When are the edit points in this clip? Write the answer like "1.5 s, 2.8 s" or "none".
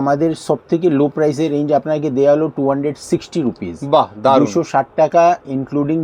none